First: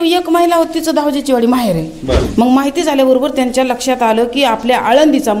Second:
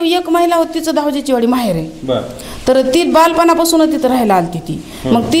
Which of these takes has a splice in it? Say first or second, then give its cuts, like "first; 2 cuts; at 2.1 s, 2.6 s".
first; 1 cut; at 2.2 s